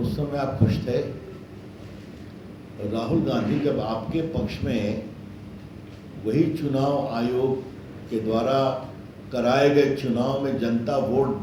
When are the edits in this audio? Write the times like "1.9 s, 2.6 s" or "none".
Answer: none